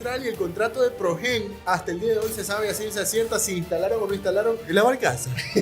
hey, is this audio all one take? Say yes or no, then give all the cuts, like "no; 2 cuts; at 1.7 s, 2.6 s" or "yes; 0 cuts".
yes; 0 cuts